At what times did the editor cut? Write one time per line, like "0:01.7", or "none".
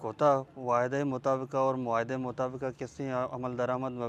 none

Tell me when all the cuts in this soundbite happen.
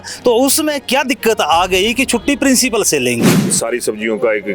0:03.4

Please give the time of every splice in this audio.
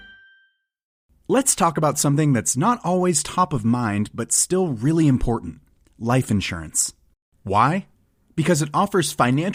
none

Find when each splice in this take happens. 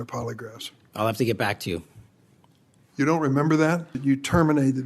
0:03.9

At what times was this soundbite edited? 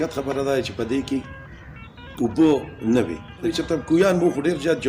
0:03.5

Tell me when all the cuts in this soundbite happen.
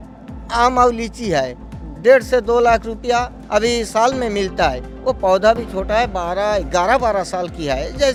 none

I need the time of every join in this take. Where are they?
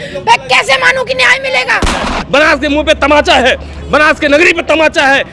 0:02.1

